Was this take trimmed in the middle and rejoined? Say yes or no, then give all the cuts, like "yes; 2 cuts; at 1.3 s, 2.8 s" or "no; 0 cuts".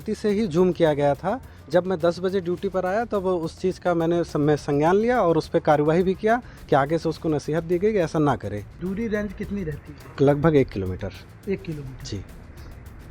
yes; 1 cut; at 8.8 s